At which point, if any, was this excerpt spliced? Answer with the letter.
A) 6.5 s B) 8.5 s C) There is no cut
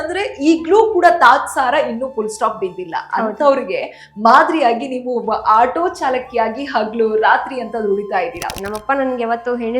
B